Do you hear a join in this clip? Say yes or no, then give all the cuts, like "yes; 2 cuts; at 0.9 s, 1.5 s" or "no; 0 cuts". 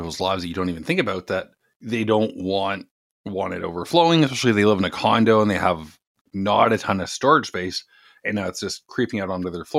no; 0 cuts